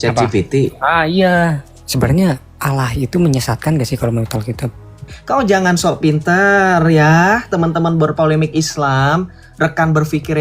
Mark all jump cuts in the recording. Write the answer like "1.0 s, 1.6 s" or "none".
1.7 s, 5.1 s

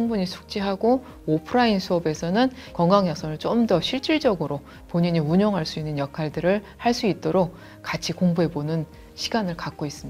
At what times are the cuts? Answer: none

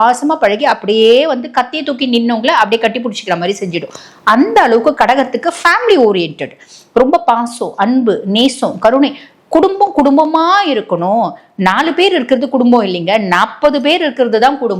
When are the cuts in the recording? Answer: none

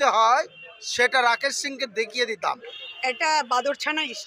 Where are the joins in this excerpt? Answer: 2.7 s

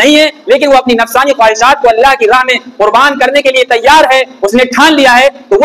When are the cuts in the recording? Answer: none

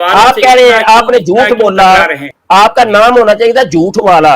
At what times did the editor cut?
2.3 s

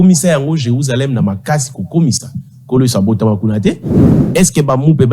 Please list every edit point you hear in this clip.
4.0 s

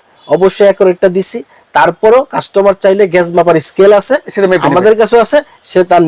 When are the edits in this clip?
none

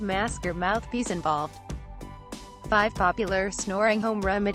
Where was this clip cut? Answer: 1.1 s

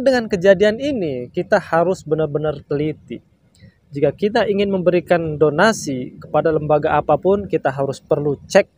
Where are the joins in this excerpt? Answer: none

